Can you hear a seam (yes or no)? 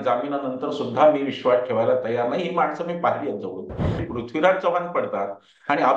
yes